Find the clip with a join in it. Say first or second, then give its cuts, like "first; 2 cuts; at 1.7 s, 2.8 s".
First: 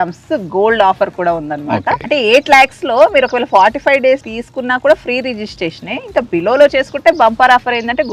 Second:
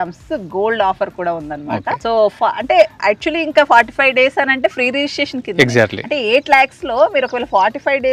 first; 2 cuts; at 2.0 s, 4.4 s